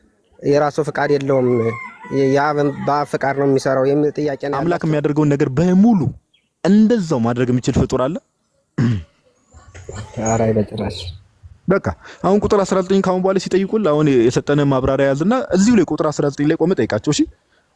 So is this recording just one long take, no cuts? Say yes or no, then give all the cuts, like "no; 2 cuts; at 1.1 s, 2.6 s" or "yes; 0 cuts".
no; 1 cut; at 4.5 s